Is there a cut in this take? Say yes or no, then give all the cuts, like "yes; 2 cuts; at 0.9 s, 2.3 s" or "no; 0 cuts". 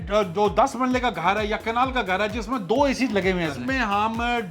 yes; 1 cut; at 3.6 s